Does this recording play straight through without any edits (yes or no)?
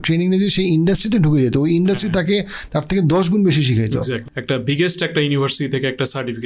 no